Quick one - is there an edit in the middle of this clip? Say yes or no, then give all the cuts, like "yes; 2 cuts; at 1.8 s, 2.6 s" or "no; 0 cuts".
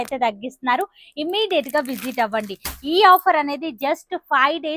no; 0 cuts